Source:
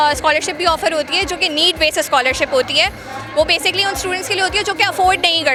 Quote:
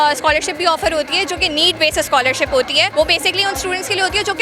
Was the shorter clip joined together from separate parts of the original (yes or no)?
yes